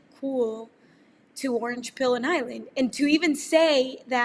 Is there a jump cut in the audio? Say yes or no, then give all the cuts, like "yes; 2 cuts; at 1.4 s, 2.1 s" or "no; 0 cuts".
no; 0 cuts